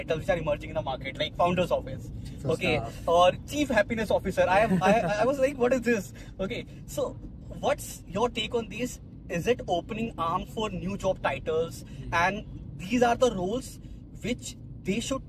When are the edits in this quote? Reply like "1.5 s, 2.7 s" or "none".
none